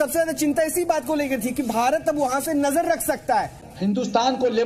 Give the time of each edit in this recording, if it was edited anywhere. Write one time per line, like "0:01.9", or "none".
0:03.6